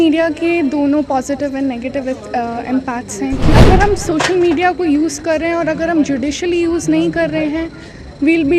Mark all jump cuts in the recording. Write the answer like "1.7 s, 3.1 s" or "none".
3.5 s